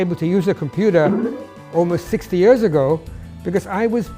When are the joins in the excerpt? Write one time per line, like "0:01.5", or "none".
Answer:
none